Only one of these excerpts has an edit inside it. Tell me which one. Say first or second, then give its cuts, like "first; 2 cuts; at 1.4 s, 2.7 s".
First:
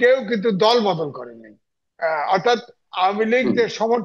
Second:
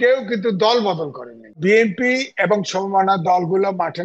second; 1 cut; at 1.6 s